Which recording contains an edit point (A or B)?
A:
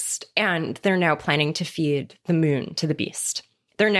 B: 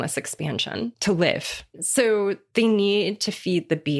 B